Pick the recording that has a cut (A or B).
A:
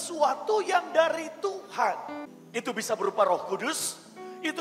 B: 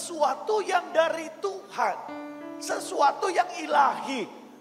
A